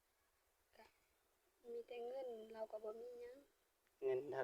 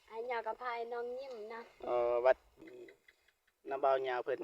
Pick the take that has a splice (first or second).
second